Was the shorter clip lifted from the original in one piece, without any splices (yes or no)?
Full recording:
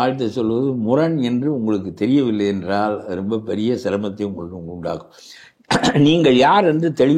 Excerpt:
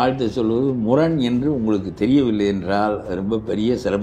yes